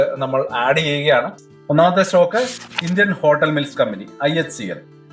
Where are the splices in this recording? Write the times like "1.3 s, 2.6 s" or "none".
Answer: 1.5 s